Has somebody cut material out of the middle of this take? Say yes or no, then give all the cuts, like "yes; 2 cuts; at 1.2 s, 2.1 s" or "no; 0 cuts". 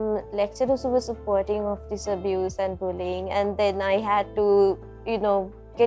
no; 0 cuts